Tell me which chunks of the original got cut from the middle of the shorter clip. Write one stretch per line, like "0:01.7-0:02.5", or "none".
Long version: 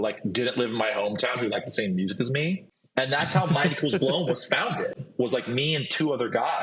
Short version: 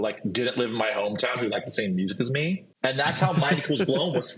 0:02.7-0:02.8